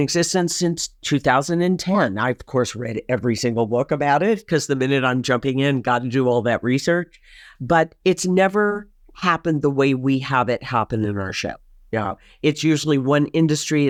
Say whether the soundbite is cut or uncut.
uncut